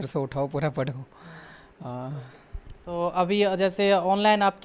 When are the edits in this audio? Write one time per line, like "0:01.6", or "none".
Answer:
none